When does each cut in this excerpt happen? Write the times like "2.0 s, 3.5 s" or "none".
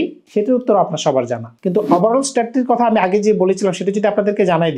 1.5 s